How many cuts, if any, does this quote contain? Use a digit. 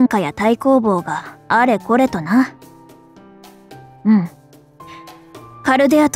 0